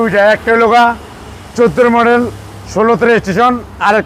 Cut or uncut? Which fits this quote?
uncut